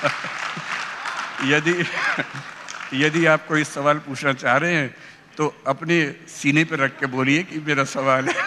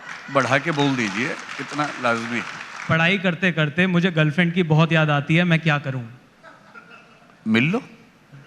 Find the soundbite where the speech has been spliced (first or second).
second